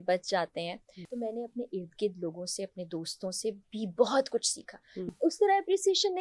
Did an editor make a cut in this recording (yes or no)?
yes